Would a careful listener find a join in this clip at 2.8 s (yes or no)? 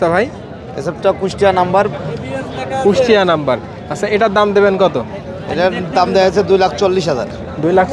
no